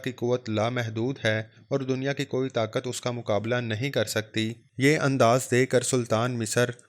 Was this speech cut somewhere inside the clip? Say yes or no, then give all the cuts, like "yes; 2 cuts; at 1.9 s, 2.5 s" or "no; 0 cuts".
yes; 1 cut; at 4.6 s